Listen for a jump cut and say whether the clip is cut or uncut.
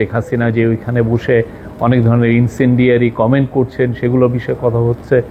uncut